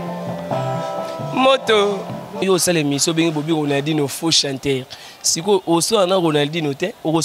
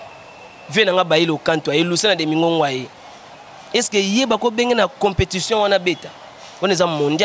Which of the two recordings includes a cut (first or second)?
first